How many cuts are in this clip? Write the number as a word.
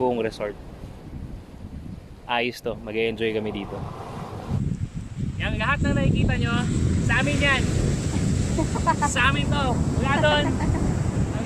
one